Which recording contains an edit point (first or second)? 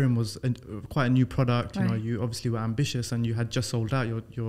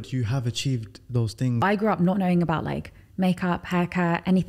second